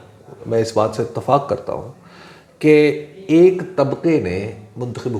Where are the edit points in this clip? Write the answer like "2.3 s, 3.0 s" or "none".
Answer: none